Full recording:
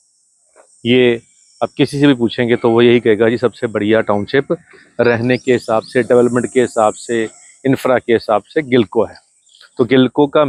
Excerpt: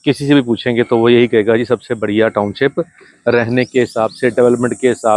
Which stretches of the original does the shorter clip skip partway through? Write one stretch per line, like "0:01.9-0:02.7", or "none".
none